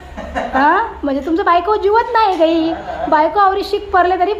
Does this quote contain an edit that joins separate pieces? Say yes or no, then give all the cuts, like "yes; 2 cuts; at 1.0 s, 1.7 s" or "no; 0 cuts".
no; 0 cuts